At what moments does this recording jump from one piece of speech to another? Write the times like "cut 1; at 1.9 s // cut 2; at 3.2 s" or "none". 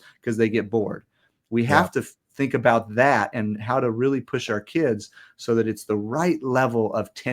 none